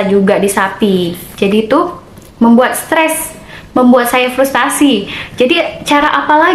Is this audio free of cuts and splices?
yes; 0 cuts

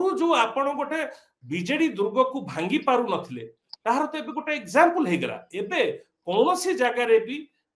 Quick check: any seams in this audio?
no; 0 cuts

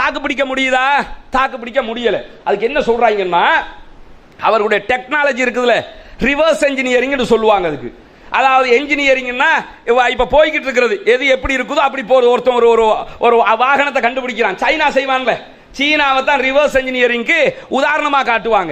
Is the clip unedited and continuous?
yes; 0 cuts

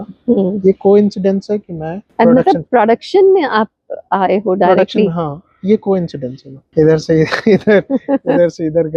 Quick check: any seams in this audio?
no; 0 cuts

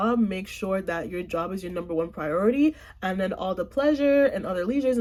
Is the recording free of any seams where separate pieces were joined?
yes; 0 cuts

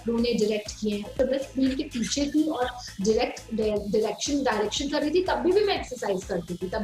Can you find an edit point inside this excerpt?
yes; 1 cut; at 1.1 s

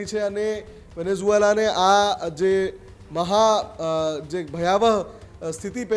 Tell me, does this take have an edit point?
no; 0 cuts

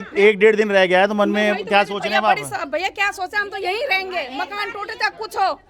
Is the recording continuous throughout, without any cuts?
yes; 0 cuts

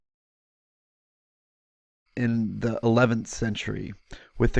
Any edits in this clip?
no; 0 cuts

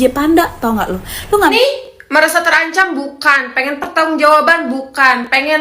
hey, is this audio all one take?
no; 1 cut; at 1.5 s

